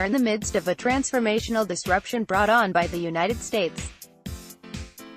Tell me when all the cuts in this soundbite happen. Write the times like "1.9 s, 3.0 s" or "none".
3.7 s

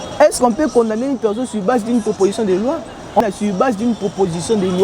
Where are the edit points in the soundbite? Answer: 3.2 s

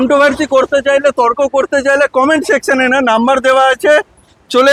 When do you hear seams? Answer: none

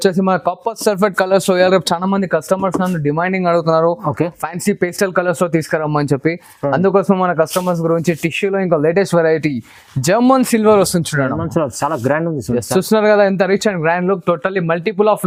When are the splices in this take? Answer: none

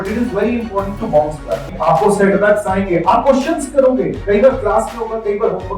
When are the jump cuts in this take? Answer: 1.7 s

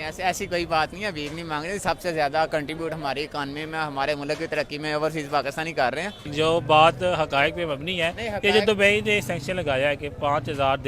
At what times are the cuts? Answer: 6.3 s

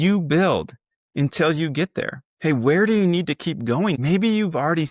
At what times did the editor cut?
2.2 s, 4.0 s

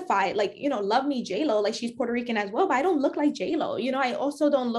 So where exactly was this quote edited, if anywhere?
none

